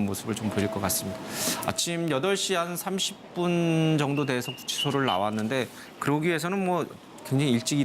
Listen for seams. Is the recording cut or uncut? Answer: uncut